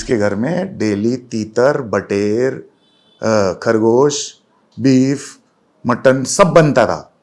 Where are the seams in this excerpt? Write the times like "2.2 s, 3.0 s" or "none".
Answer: none